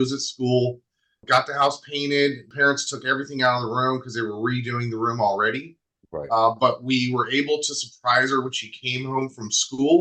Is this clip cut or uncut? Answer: uncut